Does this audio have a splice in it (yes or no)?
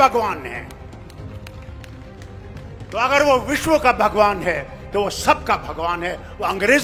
no